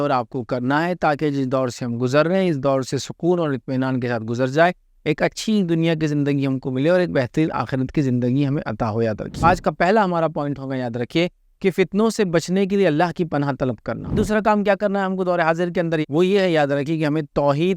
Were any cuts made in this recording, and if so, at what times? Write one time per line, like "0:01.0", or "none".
0:09.4
0:14.2
0:16.0